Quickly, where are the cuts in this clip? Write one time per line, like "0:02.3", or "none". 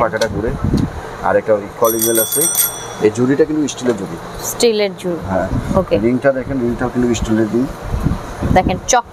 none